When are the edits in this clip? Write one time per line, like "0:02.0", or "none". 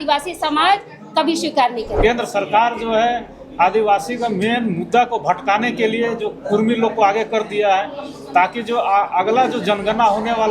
0:02.0